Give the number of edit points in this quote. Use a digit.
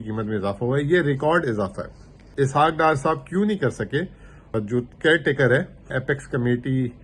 3